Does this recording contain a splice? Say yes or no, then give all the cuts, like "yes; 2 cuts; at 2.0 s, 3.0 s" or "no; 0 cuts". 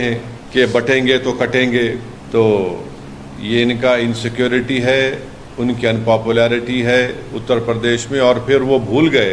no; 0 cuts